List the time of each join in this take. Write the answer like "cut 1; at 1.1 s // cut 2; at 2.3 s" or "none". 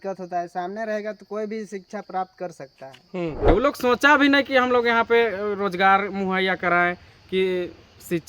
cut 1; at 3.5 s